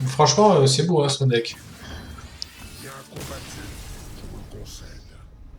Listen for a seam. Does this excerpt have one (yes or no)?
no